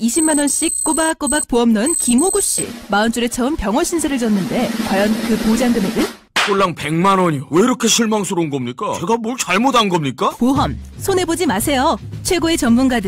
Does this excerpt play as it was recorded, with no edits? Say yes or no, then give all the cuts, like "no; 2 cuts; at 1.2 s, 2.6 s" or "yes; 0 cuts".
yes; 0 cuts